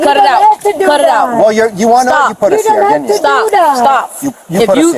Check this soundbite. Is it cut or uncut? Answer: uncut